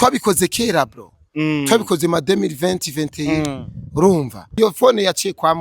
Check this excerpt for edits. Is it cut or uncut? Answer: cut